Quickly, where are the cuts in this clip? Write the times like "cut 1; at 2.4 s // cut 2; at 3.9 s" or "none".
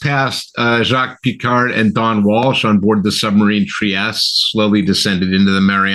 none